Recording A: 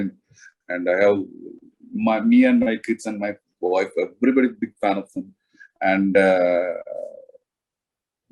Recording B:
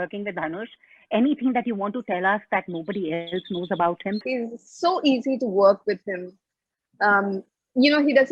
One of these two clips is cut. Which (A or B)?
B